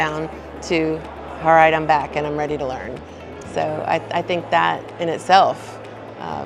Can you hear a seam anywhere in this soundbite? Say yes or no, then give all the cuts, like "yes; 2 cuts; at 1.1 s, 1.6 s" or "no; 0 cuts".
no; 0 cuts